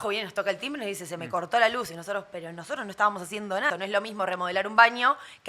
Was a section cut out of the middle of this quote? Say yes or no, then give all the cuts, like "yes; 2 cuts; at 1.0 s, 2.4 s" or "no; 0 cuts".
yes; 1 cut; at 3.7 s